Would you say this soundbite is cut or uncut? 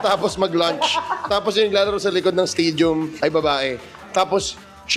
uncut